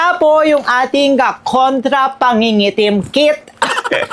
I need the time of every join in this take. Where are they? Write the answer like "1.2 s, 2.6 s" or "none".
none